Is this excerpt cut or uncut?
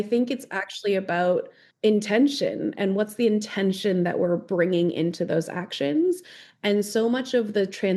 uncut